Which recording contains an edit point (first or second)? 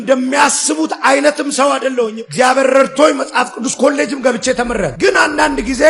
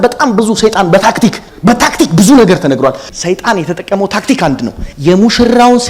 second